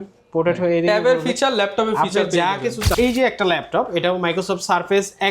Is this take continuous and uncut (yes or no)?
no